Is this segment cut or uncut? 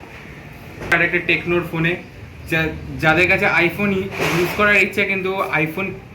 cut